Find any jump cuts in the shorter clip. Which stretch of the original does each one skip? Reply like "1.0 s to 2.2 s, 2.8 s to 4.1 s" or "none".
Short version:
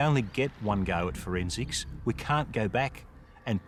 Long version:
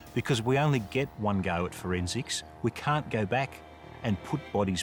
none